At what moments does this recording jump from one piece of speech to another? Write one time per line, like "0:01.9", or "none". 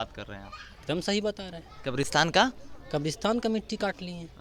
none

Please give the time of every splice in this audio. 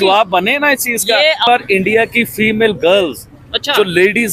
0:01.5

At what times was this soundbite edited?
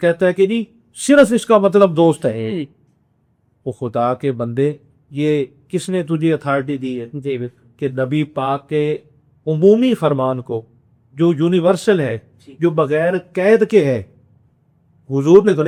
none

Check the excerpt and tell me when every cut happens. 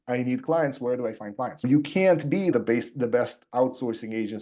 0:01.6
0:02.5

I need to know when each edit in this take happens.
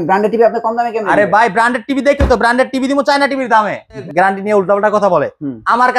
0:04.1

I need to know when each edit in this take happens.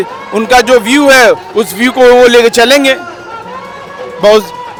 none

